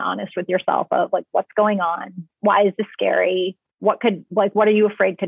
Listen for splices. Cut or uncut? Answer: uncut